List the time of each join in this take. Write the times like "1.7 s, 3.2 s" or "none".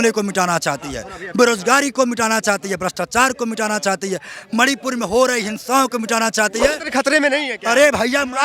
6.8 s